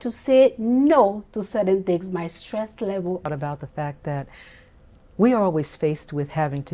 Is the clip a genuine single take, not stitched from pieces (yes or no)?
no